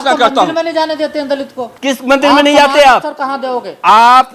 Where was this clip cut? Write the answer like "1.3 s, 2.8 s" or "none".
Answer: 1.6 s